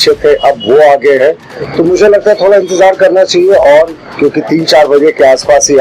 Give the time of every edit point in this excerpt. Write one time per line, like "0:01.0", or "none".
none